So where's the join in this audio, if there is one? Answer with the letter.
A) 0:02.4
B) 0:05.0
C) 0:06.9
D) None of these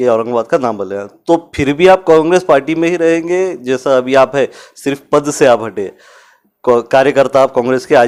D